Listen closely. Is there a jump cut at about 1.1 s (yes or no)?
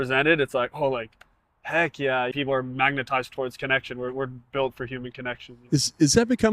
no